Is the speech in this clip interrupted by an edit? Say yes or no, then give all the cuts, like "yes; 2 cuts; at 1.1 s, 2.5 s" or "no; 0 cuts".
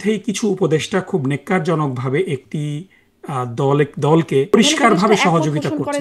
yes; 1 cut; at 4.5 s